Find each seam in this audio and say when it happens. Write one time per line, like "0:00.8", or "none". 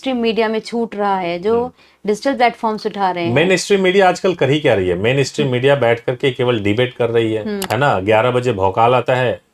0:07.6